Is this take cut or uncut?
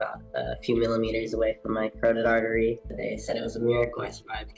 cut